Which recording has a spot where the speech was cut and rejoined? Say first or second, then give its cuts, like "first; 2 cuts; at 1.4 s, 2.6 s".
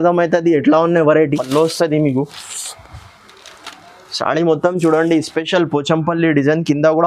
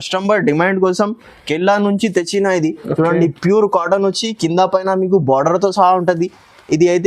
first; 1 cut; at 1.4 s